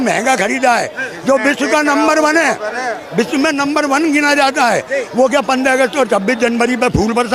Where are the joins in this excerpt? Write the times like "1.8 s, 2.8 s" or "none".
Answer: none